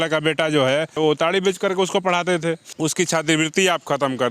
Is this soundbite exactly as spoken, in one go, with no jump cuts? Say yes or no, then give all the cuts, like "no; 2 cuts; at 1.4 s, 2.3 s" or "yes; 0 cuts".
no; 2 cuts; at 1.0 s, 2.7 s